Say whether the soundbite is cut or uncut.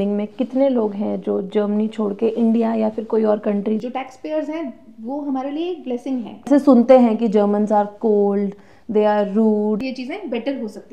cut